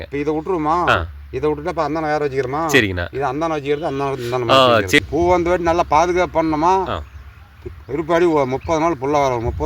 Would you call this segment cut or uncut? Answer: cut